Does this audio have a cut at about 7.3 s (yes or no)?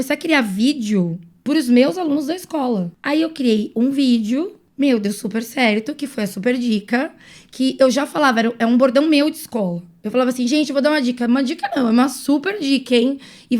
no